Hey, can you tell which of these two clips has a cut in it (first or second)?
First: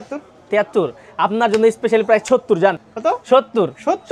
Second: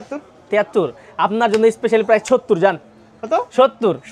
first